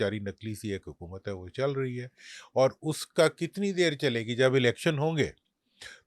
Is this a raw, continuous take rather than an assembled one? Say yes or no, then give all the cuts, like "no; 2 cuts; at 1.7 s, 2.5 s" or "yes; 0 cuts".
yes; 0 cuts